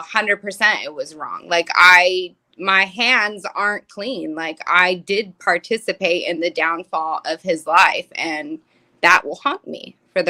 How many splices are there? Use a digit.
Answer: 0